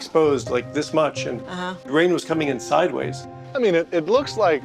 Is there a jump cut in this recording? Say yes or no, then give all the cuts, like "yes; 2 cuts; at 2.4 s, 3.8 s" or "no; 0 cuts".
yes; 2 cuts; at 1.8 s, 3.4 s